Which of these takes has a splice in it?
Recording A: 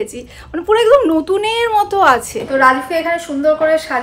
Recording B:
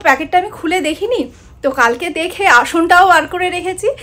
A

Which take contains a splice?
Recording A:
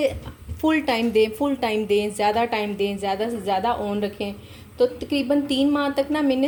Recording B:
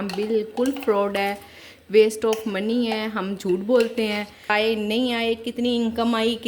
B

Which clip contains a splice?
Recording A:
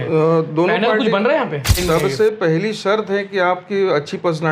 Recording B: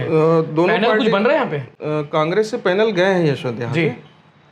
A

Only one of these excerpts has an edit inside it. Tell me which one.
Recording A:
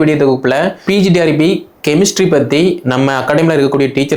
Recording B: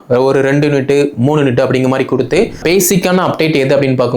B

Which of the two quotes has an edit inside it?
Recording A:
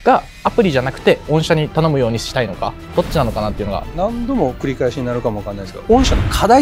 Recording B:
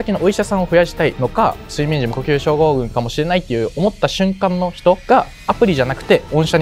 A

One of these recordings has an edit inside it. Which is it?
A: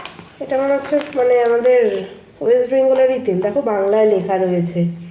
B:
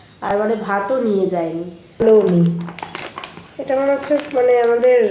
B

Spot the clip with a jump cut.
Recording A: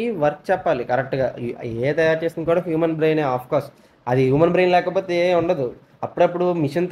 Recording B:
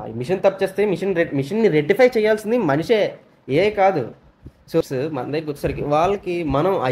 B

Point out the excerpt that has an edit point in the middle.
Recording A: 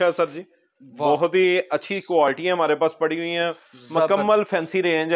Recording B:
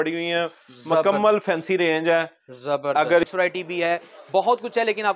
B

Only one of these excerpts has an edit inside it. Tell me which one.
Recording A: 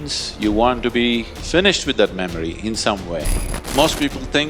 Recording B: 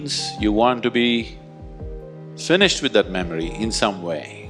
A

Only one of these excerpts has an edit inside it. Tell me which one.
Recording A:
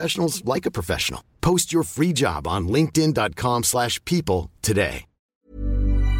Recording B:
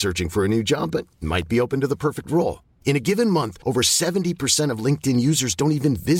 A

